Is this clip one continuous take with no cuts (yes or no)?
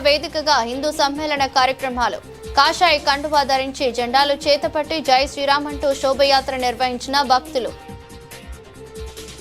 yes